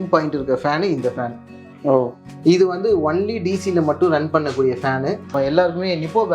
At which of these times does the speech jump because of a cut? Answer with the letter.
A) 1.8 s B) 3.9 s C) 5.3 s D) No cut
C